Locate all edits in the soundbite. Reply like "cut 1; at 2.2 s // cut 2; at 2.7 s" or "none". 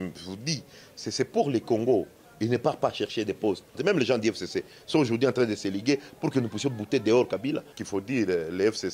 cut 1; at 3.8 s // cut 2; at 7.7 s